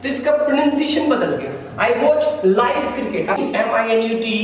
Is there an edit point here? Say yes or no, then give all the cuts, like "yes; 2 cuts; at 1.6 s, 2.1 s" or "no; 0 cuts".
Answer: yes; 1 cut; at 3.4 s